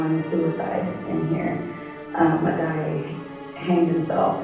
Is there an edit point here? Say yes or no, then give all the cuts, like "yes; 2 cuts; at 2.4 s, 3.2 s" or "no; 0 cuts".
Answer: no; 0 cuts